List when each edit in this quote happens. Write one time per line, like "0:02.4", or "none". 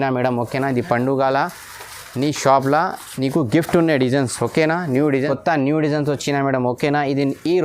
0:05.2